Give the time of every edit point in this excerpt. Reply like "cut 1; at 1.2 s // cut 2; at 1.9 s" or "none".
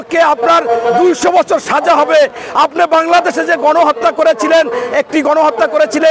none